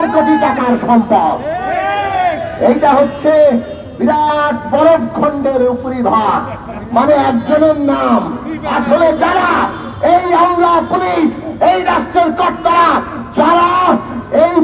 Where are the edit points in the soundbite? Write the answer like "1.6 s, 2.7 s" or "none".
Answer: none